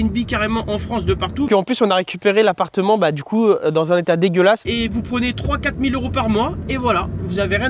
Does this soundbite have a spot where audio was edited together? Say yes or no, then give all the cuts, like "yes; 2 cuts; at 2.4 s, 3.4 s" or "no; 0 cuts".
yes; 2 cuts; at 1.5 s, 4.7 s